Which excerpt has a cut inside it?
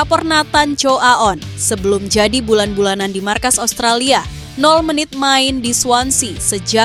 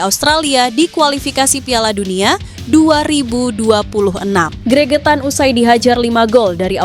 second; 1 cut; at 4.5 s

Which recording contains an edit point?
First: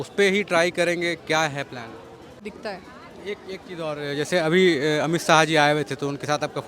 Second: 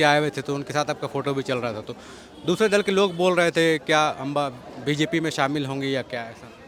first; 1 cut; at 2.5 s

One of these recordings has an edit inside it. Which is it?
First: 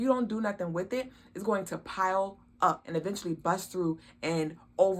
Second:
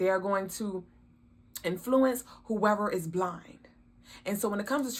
first; 1 cut; at 2.8 s

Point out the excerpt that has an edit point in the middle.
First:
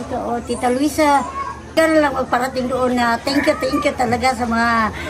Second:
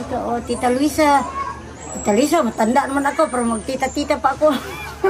first; 1 cut; at 1.6 s

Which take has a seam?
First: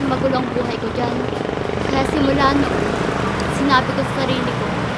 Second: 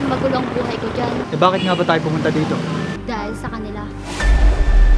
second; 2 cuts; at 1.2 s, 3.0 s

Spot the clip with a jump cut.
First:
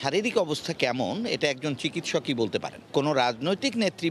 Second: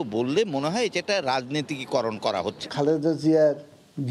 second; 1 cut; at 2.6 s

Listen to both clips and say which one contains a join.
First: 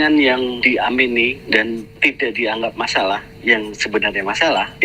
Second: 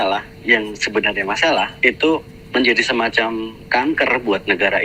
first; 1 cut; at 1.9 s

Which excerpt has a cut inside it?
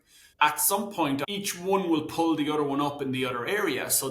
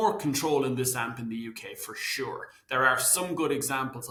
first; 1 cut; at 1.2 s

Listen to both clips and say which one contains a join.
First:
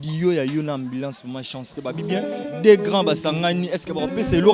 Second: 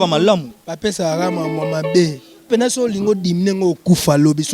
second; 1 cut; at 2.4 s

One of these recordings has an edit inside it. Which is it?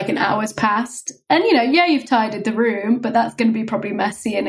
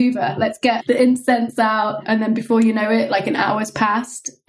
second; 2 cuts; at 0.8 s, 2.0 s

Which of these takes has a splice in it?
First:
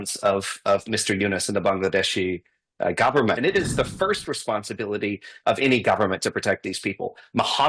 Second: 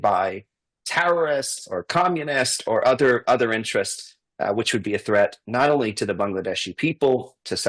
first; 1 cut; at 3.4 s

